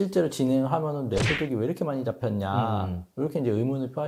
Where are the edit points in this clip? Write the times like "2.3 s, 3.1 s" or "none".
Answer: none